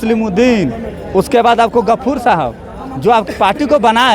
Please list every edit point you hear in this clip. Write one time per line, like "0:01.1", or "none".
0:03.2

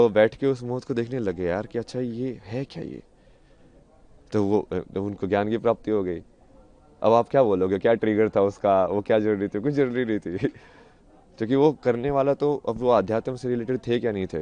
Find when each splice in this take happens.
none

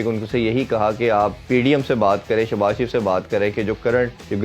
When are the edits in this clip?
0:01.4

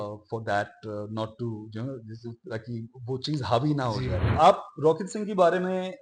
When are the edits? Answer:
0:04.3

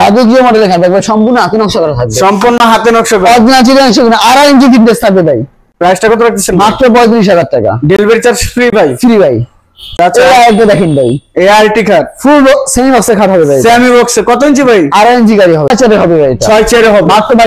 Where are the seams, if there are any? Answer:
0:10.0
0:15.7

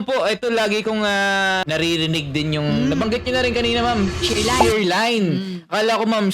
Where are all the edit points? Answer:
0:01.7

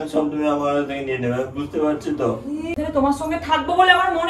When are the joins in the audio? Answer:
0:02.8

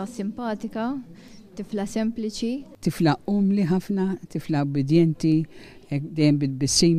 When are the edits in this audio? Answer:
0:03.0

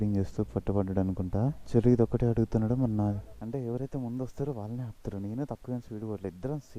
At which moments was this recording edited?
0:01.6
0:03.3

